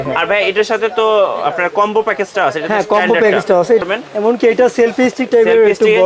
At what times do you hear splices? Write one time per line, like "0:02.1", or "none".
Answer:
0:03.8